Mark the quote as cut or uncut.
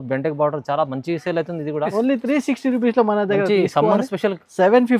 cut